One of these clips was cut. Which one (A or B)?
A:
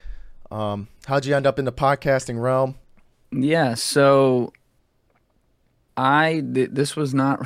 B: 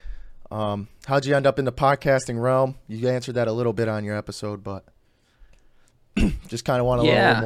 A